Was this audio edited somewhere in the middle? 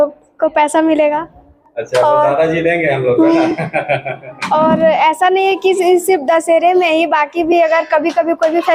no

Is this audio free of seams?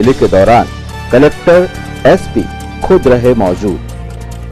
yes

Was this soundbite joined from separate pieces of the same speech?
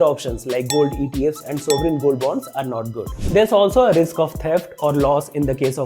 yes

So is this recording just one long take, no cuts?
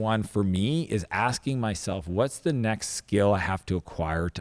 yes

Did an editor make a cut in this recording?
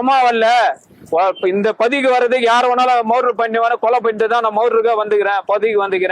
no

